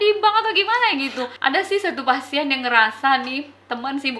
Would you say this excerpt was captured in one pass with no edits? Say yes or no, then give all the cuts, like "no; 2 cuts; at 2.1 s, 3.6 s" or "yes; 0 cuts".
no; 1 cut; at 1.2 s